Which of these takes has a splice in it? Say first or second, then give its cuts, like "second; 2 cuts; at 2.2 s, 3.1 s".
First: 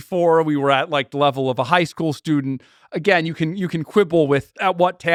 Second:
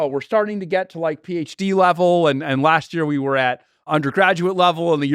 second; 1 cut; at 3.9 s